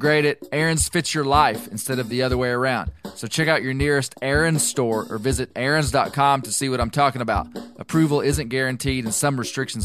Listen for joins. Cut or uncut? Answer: uncut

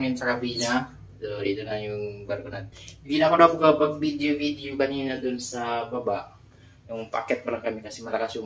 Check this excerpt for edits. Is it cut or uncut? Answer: uncut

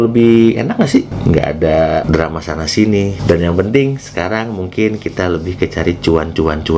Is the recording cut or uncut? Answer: cut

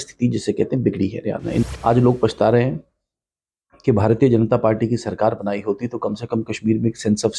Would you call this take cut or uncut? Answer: cut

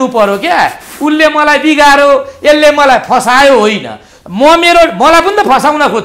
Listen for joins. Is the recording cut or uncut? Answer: uncut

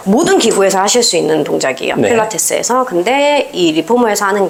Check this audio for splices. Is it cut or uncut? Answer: uncut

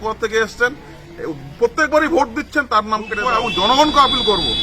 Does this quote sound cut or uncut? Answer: cut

